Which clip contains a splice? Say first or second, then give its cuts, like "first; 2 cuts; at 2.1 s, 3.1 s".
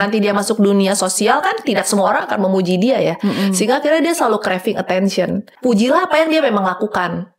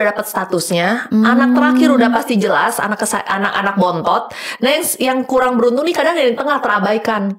first; 1 cut; at 5.5 s